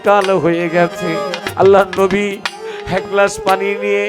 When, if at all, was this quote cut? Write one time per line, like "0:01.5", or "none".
0:01.4